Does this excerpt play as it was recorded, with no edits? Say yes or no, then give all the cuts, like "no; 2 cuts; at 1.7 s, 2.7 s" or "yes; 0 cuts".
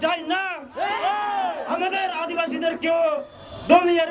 yes; 0 cuts